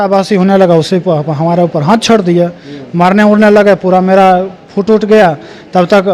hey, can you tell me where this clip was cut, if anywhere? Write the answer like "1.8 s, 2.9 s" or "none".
none